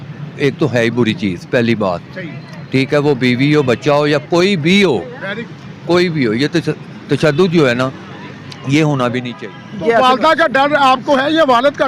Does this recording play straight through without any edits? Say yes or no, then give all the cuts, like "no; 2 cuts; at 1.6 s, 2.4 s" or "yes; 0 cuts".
no; 1 cut; at 9.3 s